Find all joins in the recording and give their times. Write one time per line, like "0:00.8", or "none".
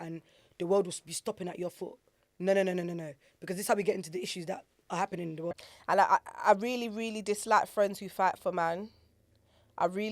0:05.7